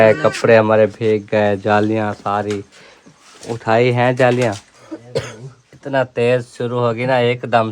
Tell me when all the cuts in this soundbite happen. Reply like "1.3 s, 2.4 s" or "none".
4.9 s